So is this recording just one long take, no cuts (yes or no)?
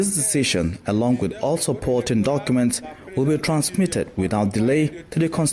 yes